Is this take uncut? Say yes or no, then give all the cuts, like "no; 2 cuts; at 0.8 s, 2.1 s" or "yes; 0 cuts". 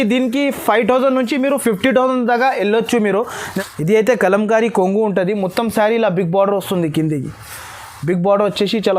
no; 1 cut; at 3.4 s